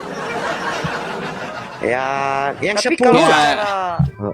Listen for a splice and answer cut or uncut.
cut